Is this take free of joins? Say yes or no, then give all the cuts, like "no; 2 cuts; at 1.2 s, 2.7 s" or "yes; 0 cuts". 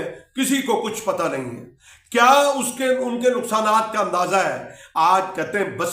yes; 0 cuts